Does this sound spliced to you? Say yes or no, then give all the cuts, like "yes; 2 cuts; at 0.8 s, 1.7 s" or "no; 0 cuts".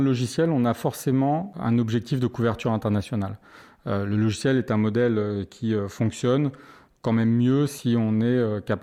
no; 0 cuts